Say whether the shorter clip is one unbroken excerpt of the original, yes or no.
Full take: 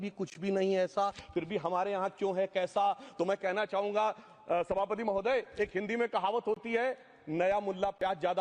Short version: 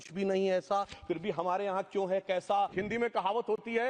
no